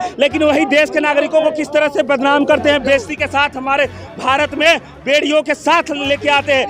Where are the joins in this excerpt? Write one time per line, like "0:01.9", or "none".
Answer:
none